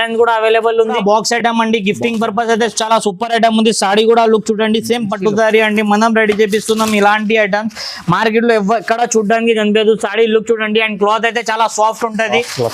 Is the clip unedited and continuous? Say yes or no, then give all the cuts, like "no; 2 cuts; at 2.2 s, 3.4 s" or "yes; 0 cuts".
no; 1 cut; at 1.0 s